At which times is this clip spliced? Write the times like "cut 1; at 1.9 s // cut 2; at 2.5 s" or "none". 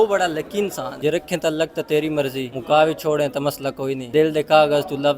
cut 1; at 0.9 s // cut 2; at 2.5 s // cut 3; at 4.0 s